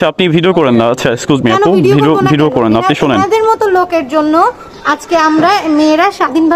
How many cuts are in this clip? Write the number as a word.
zero